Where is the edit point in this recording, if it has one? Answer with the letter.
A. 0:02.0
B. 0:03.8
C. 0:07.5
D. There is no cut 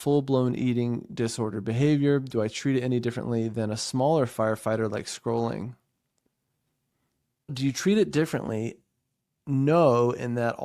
C